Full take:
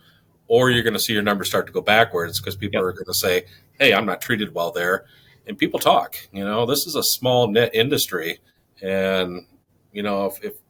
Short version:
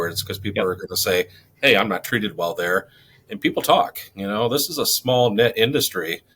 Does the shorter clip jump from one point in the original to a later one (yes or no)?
no